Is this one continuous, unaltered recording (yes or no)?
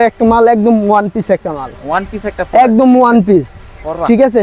yes